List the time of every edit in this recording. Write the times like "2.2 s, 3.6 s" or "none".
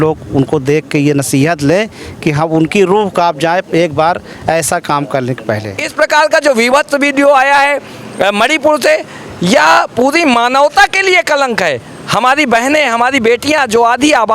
5.8 s